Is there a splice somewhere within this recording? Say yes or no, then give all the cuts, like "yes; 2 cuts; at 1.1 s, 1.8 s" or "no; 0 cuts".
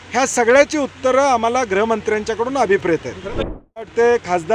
yes; 1 cut; at 3.4 s